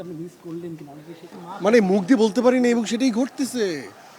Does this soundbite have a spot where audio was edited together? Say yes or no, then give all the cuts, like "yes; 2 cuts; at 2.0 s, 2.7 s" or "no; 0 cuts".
yes; 1 cut; at 1.4 s